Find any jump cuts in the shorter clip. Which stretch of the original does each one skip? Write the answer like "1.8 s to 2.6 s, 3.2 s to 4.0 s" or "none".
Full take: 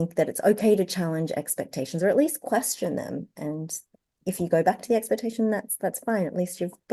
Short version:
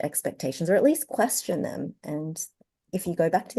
none